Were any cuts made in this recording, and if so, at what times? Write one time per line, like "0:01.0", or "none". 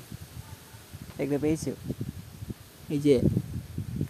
none